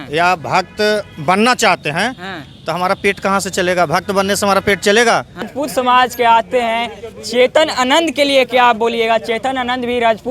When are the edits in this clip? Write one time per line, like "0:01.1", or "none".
0:05.5

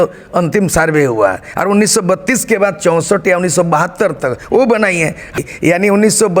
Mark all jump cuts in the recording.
0:05.3

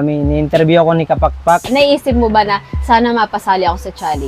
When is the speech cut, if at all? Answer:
0:01.7

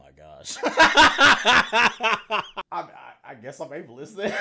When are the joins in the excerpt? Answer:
0:02.6

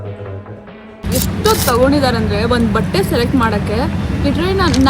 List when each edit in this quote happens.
0:01.0

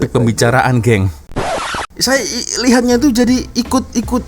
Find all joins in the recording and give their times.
0:01.4

